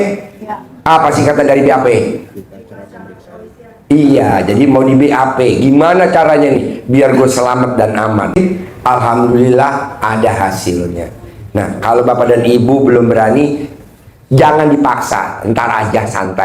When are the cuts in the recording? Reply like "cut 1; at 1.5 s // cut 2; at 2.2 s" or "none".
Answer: cut 1; at 8.4 s